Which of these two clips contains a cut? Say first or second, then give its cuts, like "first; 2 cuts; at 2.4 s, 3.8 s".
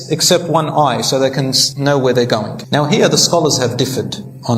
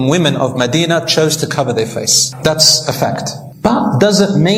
first; 2 cuts; at 1.6 s, 2.6 s